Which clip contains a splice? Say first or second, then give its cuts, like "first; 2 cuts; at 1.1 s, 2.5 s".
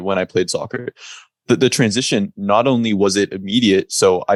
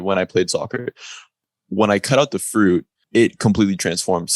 second; 2 cuts; at 1.3 s, 3.0 s